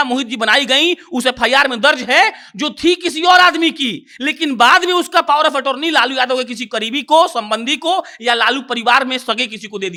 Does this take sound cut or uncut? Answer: uncut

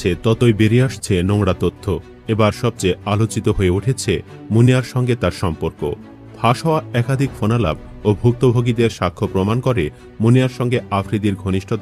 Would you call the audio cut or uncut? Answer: uncut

